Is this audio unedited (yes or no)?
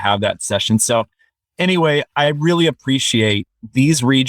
no